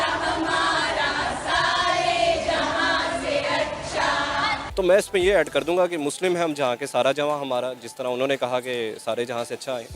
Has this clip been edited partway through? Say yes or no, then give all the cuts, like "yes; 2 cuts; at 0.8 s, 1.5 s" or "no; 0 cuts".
yes; 1 cut; at 4.6 s